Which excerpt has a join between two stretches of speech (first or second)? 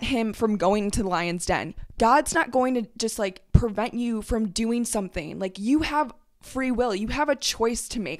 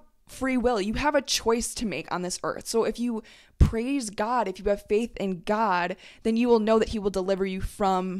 first